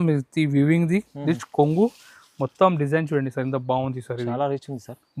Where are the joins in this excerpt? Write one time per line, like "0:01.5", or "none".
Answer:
none